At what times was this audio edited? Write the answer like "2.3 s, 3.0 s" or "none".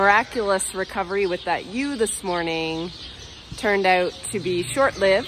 none